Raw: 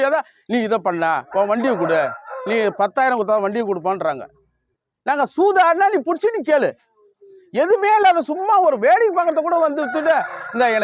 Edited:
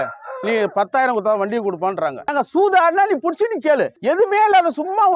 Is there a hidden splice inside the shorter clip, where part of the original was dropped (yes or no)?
yes